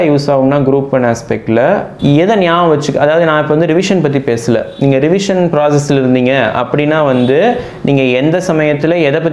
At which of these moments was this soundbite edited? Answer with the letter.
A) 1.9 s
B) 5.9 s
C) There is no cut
A